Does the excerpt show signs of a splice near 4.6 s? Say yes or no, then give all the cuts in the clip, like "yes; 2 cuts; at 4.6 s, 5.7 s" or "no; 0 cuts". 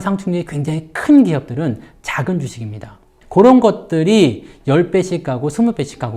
no; 1 cut; at 3.1 s